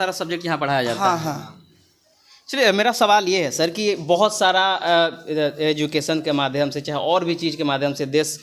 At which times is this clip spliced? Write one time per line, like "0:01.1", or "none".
none